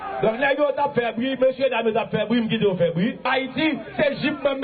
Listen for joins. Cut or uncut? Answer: uncut